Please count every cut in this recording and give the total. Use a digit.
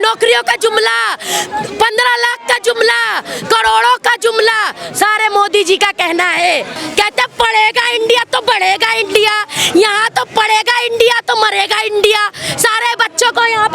1